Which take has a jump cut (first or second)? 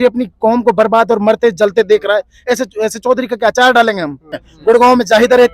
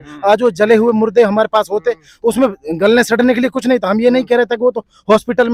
first